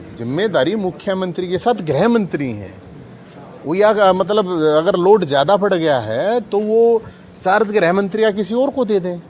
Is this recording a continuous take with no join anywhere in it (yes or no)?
yes